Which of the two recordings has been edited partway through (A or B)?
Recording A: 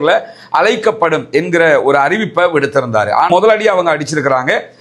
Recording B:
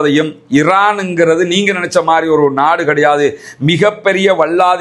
A